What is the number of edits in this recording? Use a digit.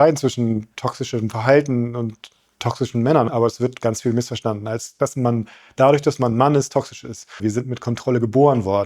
3